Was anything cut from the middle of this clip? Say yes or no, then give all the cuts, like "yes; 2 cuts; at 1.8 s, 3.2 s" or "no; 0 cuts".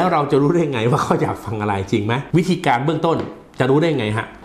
yes; 1 cut; at 2.2 s